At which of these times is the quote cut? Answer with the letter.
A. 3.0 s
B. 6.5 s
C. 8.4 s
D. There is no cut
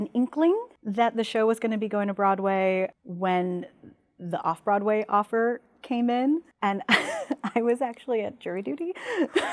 D